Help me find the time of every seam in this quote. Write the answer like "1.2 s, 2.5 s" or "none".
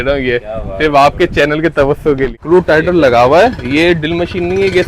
2.4 s

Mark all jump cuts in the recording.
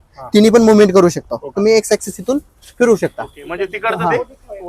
1.4 s

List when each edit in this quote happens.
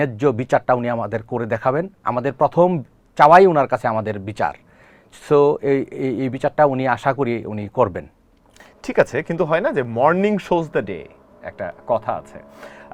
none

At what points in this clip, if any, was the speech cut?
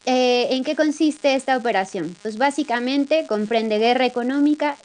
1.8 s

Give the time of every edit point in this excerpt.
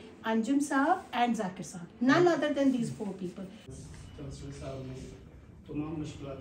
3.6 s

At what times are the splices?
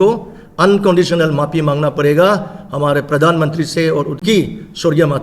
4.2 s

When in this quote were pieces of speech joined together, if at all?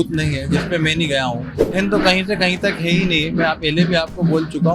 1.7 s

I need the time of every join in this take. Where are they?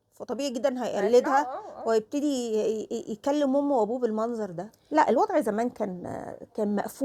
4.7 s

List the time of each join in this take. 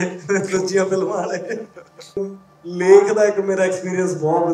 2.2 s

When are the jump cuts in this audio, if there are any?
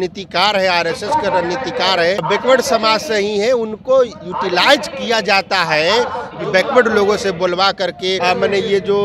2.2 s, 6.3 s, 8.2 s

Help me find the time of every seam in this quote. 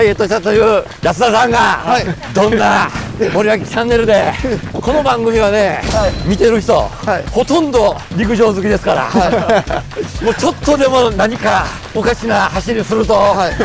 0.9 s, 2.2 s, 3.0 s, 4.7 s, 6.2 s, 7.2 s, 8.1 s, 11.8 s

